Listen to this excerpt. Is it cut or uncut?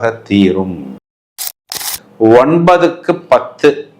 cut